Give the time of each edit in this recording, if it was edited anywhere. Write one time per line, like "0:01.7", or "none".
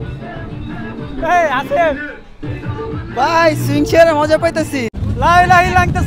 0:05.0